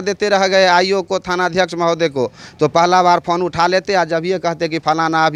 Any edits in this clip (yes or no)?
no